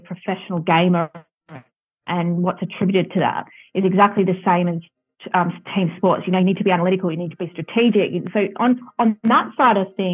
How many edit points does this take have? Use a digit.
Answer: 1